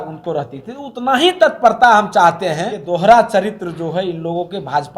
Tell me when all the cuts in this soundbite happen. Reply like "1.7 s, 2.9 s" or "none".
2.8 s